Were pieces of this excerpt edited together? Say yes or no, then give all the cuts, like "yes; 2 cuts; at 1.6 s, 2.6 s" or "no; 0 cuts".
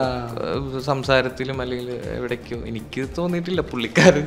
no; 0 cuts